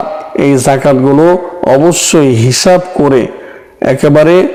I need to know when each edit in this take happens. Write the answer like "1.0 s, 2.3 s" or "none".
none